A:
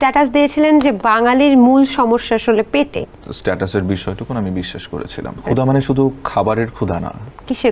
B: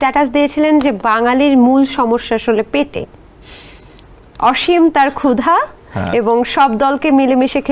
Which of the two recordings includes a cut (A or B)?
A